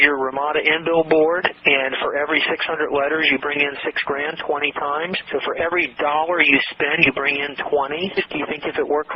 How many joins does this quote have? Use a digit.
1